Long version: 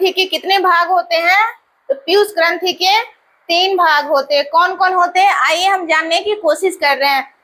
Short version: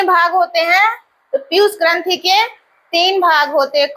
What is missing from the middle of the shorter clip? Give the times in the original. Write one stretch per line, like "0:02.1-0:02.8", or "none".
none